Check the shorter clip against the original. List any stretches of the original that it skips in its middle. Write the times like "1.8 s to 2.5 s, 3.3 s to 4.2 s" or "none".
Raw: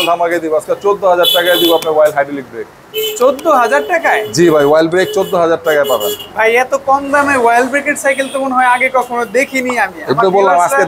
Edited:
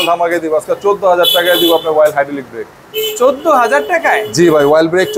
none